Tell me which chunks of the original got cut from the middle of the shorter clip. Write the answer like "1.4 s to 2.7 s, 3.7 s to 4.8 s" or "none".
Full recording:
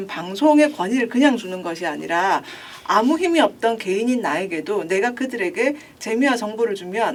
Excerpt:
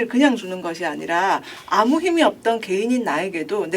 2.5 s to 2.7 s